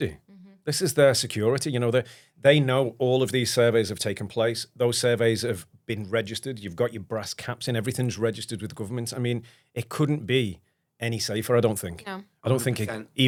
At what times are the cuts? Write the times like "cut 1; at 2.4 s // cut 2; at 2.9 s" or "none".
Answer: none